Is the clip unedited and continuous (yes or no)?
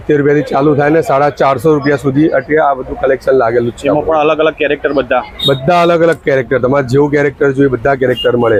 yes